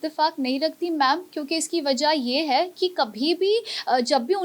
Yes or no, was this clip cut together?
no